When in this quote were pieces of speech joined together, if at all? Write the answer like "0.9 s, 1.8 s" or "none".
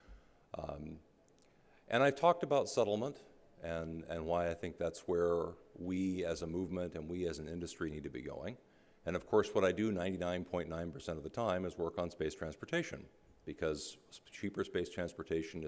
7.6 s